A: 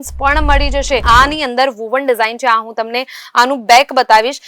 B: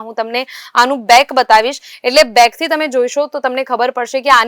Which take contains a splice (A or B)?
A